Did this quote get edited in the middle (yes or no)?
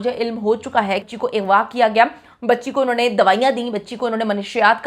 yes